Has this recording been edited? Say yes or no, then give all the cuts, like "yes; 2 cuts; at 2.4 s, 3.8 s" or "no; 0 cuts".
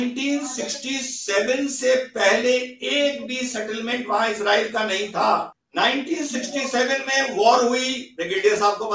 yes; 1 cut; at 5.6 s